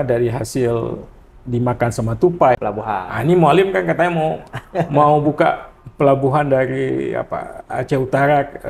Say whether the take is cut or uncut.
cut